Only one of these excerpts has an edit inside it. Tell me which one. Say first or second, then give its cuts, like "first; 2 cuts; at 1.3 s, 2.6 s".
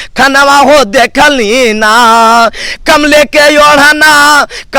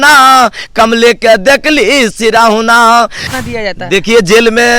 second; 1 cut; at 3.3 s